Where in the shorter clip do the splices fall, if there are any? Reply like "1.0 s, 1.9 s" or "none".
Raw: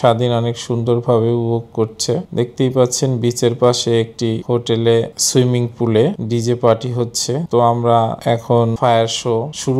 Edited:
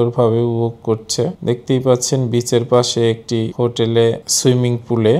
none